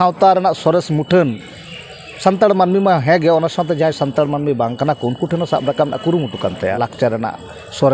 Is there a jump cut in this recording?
yes; 1 cut; at 6.8 s

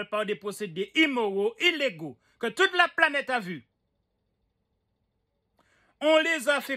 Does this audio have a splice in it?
no; 0 cuts

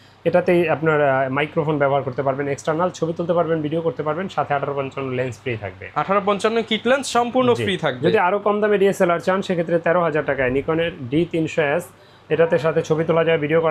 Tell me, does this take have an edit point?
no; 0 cuts

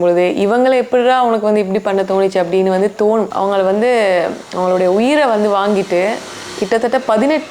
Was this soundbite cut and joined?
yes; 1 cut; at 3.3 s

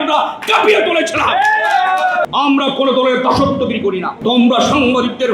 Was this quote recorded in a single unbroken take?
no; 2 cuts; at 2.2 s, 4.1 s

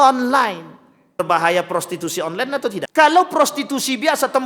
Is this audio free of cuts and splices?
no; 2 cuts; at 1.2 s, 2.9 s

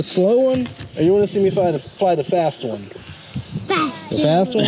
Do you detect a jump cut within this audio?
no; 0 cuts

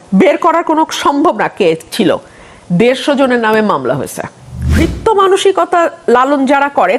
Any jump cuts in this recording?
yes; 1 cut; at 4.7 s

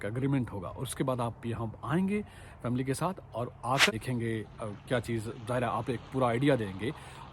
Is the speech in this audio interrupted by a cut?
yes; 1 cut; at 3.9 s

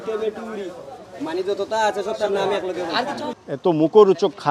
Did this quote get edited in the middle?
yes; 1 cut; at 3.3 s

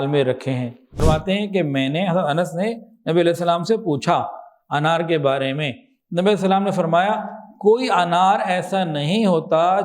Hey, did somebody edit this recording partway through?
yes; 1 cut; at 1.0 s

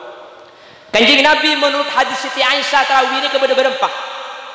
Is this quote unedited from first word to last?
yes; 0 cuts

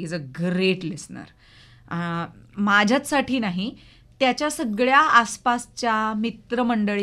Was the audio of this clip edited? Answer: no; 0 cuts

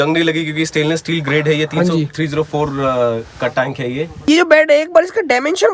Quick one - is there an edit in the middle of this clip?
yes; 1 cut; at 4.2 s

